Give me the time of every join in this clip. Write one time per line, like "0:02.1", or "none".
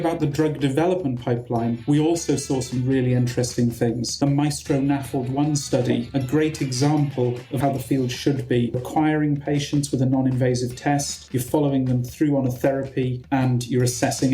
0:04.1
0:07.5
0:08.8

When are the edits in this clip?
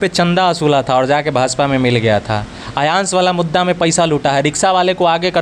none

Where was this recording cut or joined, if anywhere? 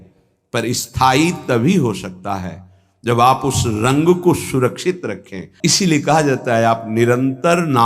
0:05.4

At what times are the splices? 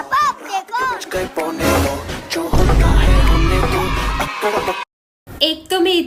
none

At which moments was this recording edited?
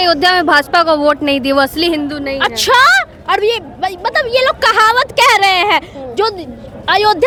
none

